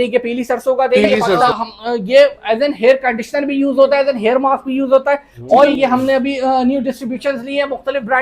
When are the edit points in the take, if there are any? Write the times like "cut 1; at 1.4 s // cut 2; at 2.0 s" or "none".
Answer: cut 1; at 1.5 s // cut 2; at 5.7 s